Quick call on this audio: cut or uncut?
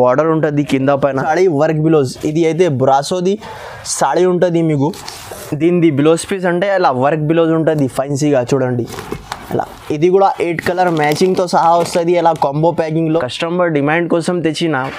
cut